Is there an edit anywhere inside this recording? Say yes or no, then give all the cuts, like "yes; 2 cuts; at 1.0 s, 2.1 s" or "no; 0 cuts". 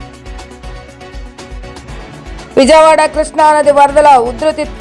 yes; 1 cut; at 2.0 s